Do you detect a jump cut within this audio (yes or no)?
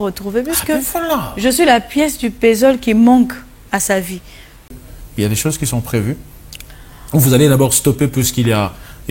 yes